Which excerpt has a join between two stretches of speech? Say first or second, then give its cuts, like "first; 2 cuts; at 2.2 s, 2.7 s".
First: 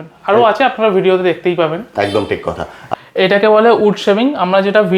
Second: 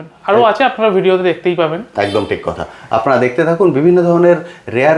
first; 1 cut; at 2.7 s